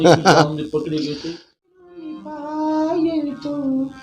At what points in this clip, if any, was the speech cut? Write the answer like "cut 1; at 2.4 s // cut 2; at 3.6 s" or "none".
cut 1; at 1.7 s